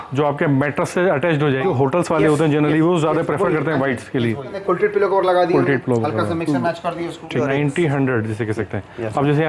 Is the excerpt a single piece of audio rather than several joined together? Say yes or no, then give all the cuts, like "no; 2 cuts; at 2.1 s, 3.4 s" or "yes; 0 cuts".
no; 3 cuts; at 1.6 s, 4.6 s, 7.4 s